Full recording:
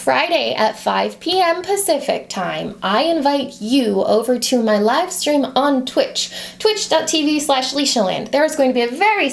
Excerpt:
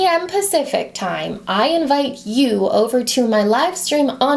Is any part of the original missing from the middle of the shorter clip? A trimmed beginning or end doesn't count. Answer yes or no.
no